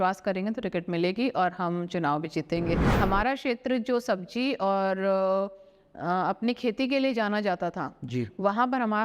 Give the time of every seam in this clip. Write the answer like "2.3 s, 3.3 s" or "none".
2.9 s